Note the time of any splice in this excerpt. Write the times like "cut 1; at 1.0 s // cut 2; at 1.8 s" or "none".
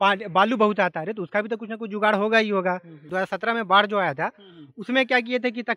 cut 1; at 3.0 s